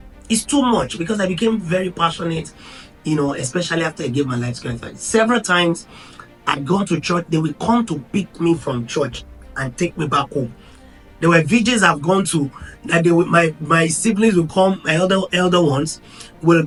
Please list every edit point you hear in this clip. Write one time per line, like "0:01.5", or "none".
none